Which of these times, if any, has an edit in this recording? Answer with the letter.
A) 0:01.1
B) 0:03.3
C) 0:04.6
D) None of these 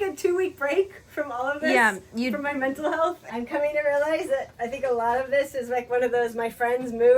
B